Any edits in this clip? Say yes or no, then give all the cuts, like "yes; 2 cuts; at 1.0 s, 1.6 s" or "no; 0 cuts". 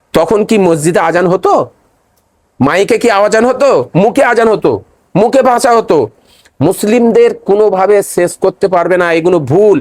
no; 0 cuts